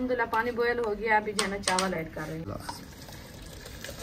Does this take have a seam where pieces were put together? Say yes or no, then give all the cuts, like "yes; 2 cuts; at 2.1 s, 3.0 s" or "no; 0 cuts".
yes; 1 cut; at 2.5 s